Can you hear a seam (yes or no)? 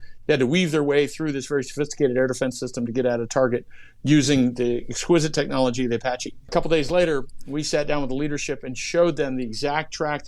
yes